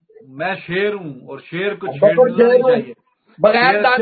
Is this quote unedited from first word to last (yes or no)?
yes